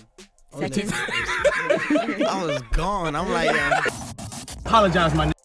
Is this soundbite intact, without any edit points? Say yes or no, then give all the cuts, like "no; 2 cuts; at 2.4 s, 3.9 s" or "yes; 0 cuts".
no; 1 cut; at 4.3 s